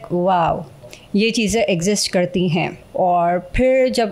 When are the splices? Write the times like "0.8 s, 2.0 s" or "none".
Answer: 2.8 s